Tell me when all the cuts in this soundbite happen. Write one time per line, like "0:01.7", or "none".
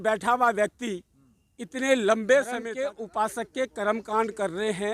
0:02.7